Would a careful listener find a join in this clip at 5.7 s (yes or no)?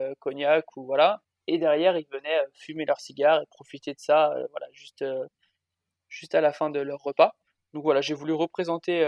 no